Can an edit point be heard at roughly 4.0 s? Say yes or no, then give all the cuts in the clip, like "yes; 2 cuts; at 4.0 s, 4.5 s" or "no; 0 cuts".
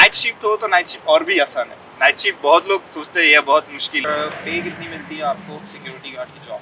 yes; 1 cut; at 4.0 s